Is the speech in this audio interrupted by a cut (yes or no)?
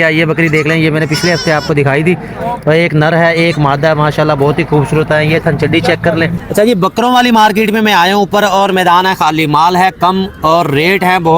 yes